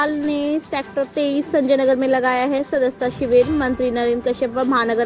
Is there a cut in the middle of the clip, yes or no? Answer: no